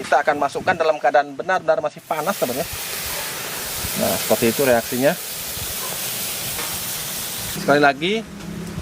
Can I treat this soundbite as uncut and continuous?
no; 1 cut; at 7.6 s

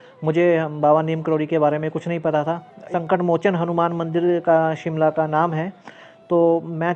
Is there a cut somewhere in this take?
yes; 1 cut; at 2.9 s

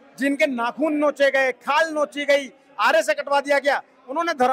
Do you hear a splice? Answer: no; 0 cuts

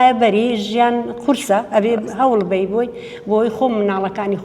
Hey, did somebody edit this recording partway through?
no; 0 cuts

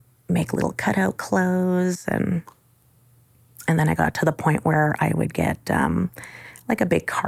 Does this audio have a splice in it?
no; 0 cuts

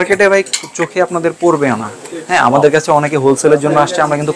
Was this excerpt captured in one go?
yes; 0 cuts

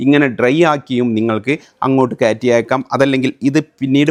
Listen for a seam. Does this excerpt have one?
no; 0 cuts

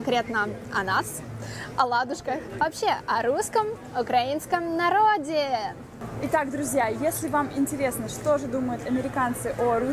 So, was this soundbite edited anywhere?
yes; 1 cut; at 4.3 s

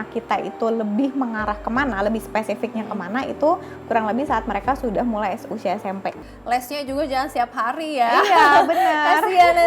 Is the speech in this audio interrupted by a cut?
yes; 1 cut; at 6.3 s

